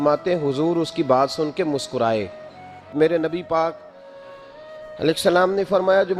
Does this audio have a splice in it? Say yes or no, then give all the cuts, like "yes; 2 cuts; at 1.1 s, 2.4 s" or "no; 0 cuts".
yes; 1 cut; at 2.9 s